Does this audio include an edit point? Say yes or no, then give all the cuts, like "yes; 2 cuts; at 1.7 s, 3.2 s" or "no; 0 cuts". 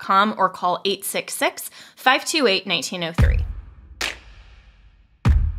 yes; 1 cut; at 3.1 s